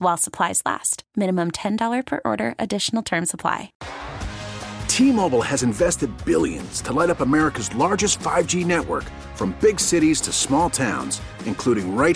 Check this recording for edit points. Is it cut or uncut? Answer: cut